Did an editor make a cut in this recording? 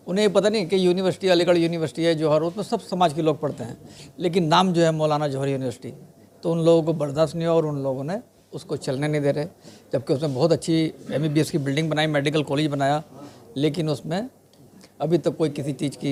no; 0 cuts

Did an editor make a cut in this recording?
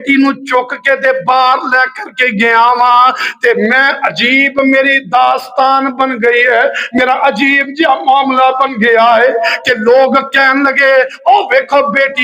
no; 0 cuts

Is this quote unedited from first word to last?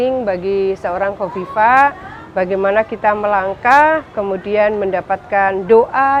yes; 0 cuts

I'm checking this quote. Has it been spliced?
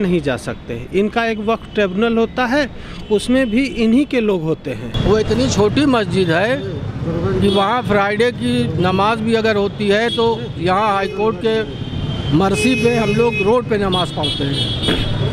yes; 1 cut; at 4.9 s

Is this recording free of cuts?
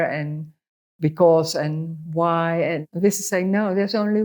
no; 1 cut; at 2.9 s

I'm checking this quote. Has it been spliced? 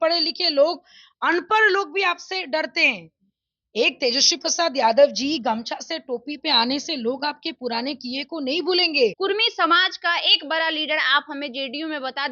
yes; 1 cut; at 9.2 s

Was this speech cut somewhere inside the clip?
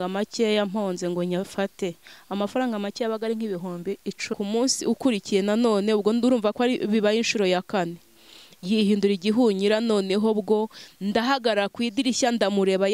yes; 1 cut; at 4.2 s

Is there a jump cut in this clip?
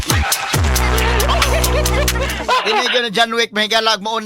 yes; 1 cut; at 2.3 s

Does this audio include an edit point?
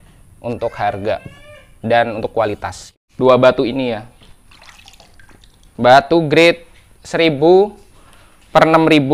yes; 1 cut; at 3.0 s

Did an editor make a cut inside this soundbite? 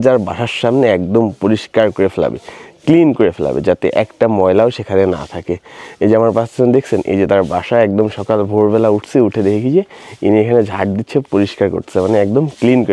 no; 0 cuts

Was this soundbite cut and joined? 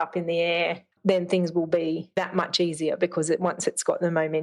yes; 1 cut; at 2.1 s

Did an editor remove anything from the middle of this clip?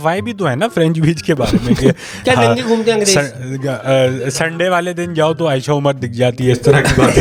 no; 0 cuts

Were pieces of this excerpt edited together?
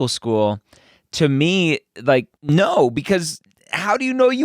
yes; 1 cut; at 2.3 s

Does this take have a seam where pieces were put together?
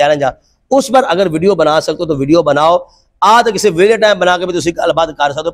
no; 0 cuts

